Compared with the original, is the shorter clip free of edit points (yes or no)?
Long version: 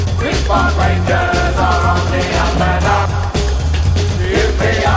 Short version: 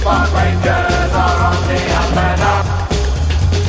yes